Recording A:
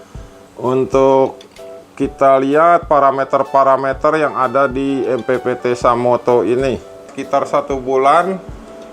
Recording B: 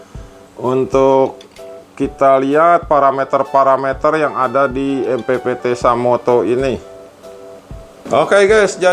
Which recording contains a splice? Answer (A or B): A